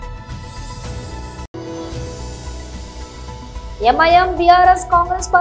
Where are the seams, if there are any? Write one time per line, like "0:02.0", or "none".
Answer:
0:01.5
0:03.5

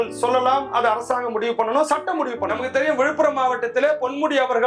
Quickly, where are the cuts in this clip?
0:02.5

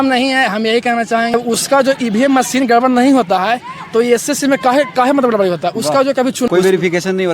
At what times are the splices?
0:01.3
0:06.5

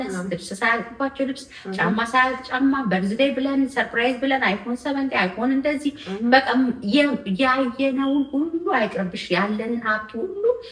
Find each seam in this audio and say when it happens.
none

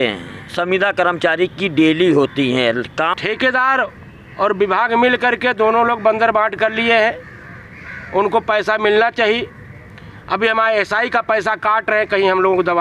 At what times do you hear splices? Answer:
0:03.1

